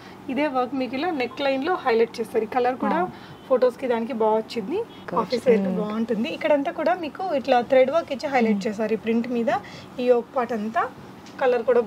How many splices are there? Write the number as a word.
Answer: one